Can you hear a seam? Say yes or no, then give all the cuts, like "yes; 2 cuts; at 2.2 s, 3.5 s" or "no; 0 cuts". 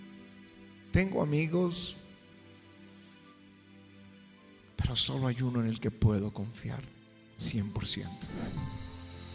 no; 0 cuts